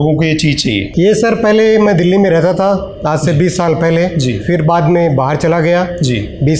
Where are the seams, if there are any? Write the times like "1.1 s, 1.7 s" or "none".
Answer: none

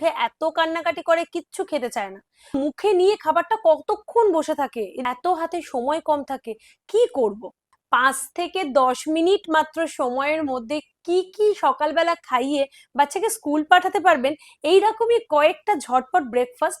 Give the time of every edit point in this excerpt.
2.5 s, 4.9 s, 7.7 s

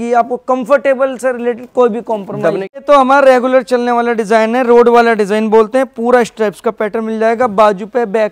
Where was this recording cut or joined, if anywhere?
2.8 s

